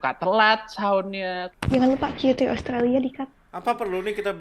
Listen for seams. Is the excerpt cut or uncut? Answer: cut